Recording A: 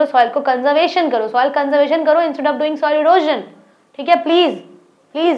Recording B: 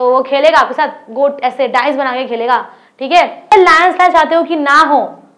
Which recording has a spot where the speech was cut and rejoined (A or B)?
B